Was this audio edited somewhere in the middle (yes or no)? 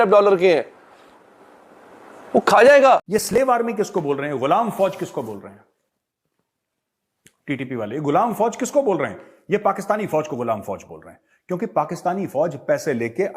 yes